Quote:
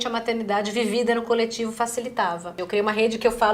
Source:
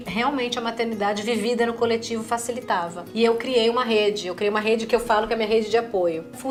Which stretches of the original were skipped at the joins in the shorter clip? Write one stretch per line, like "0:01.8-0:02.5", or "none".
0:03.1-0:04.2